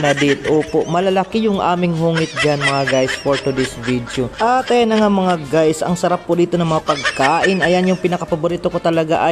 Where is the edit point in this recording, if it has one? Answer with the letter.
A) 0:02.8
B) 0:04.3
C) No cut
B